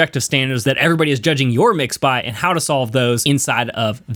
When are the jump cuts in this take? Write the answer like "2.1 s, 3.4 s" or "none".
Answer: none